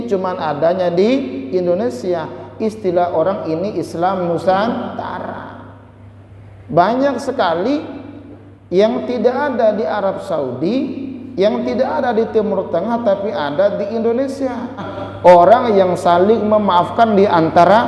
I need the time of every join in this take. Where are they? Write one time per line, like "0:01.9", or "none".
0:15.0